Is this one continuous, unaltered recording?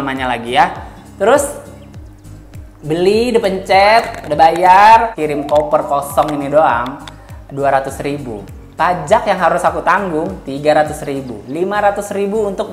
no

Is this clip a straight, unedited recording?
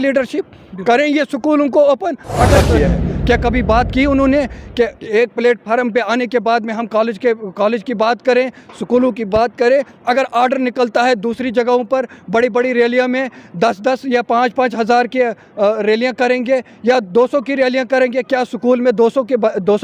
no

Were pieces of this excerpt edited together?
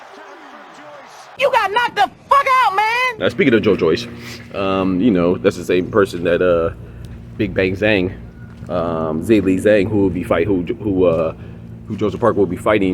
yes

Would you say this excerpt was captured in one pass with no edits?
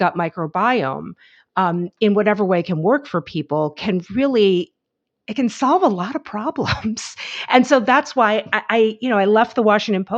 yes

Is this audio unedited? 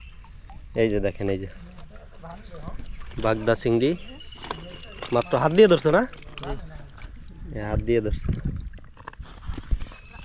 yes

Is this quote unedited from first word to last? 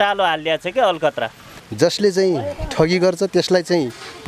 no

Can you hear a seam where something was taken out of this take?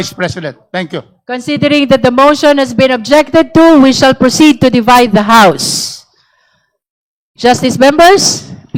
no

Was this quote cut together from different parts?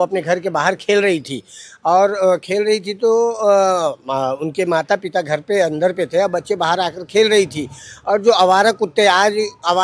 no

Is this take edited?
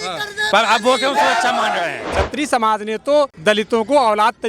yes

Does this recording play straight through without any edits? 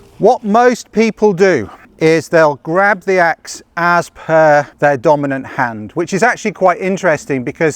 no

